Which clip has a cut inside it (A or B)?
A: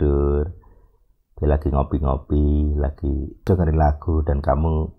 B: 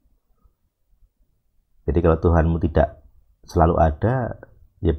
A